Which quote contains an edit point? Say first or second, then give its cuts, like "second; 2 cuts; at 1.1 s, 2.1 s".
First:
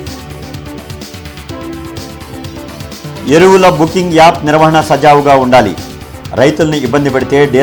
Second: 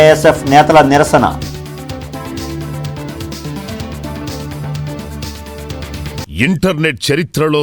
second; 1 cut; at 6.2 s